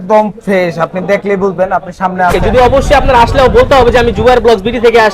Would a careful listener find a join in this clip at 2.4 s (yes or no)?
yes